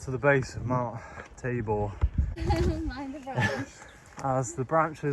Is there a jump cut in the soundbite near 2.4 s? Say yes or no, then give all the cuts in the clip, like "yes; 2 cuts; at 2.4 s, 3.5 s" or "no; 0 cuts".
yes; 1 cut; at 2.4 s